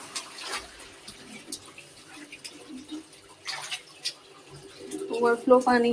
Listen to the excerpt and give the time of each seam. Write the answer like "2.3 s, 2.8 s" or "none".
none